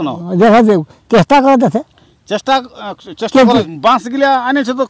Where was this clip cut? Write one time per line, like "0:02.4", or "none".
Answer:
0:03.7